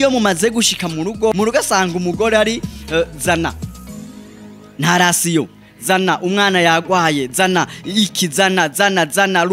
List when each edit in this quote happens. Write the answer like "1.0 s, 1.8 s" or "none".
1.3 s